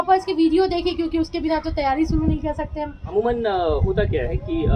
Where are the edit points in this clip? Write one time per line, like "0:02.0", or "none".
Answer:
0:03.0